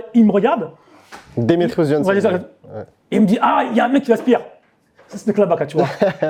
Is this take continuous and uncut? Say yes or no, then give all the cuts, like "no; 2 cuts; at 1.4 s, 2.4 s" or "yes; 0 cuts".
yes; 0 cuts